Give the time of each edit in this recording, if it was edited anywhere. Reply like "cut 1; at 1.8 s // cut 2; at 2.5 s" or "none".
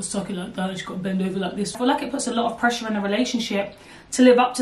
cut 1; at 1.7 s